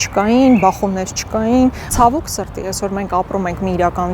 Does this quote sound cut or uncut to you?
cut